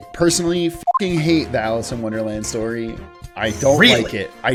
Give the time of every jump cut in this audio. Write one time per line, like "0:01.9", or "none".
none